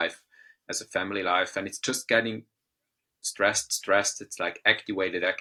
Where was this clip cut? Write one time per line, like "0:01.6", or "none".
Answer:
none